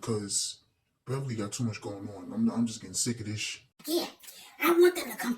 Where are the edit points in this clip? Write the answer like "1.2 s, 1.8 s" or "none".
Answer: 3.7 s